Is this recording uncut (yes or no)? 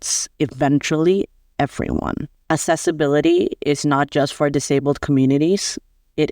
no